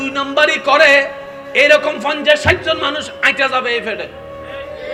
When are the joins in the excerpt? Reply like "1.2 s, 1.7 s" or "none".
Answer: none